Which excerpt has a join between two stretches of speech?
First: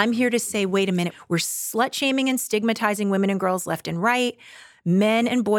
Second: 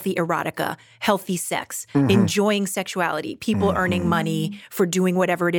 first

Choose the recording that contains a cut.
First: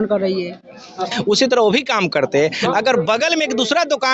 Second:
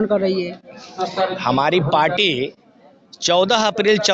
first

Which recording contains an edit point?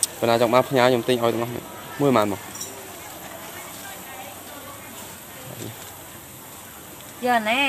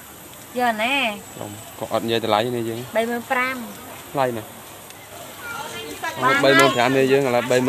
second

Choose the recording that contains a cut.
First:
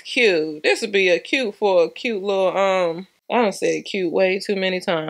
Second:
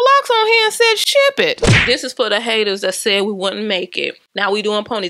second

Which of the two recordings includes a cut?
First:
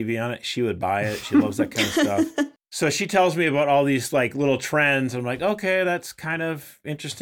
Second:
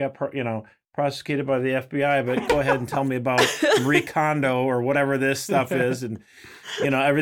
first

